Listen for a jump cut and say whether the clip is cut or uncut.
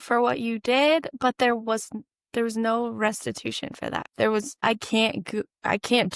cut